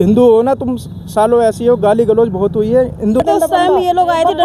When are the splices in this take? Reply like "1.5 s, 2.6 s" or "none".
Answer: 3.2 s